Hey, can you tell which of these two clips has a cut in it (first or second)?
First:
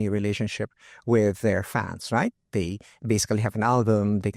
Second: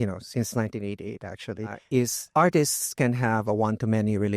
second